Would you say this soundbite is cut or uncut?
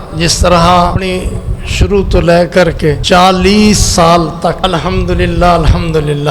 cut